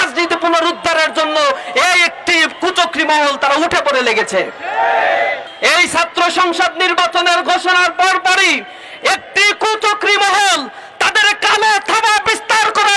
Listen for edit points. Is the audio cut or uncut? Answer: cut